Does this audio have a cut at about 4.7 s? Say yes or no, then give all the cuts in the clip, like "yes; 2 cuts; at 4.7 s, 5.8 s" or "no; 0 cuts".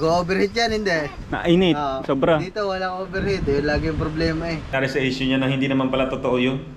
yes; 1 cut; at 4.7 s